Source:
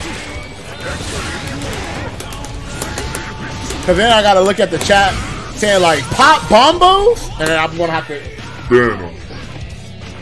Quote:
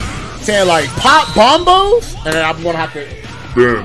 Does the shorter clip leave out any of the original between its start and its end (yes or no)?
no